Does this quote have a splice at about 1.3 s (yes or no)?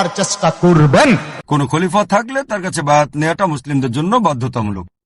yes